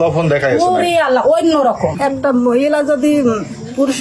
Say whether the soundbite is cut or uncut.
cut